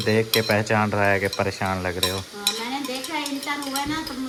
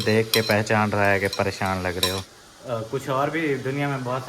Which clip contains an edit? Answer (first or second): second